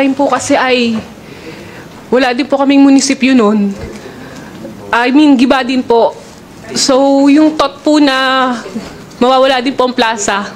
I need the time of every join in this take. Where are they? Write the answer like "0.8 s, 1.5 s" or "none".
none